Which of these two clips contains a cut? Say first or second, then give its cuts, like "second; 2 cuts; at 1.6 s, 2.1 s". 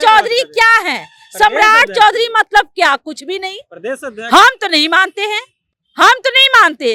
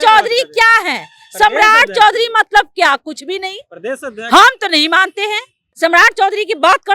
second; 1 cut; at 5.6 s